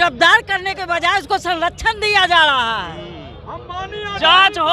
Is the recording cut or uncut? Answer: uncut